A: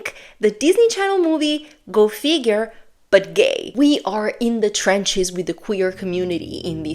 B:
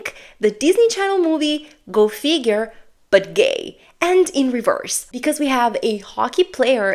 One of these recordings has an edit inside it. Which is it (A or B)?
A